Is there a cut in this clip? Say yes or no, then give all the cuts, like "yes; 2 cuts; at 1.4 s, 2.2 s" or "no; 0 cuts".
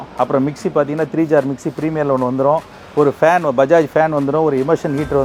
no; 0 cuts